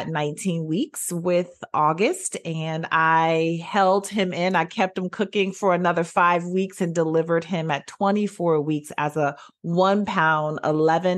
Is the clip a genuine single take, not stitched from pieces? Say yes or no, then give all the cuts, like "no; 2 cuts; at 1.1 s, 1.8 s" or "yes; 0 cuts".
yes; 0 cuts